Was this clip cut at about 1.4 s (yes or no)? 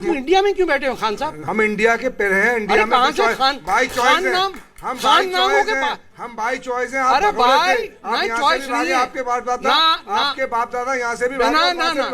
yes